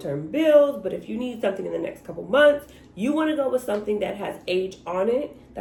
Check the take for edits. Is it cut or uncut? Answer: uncut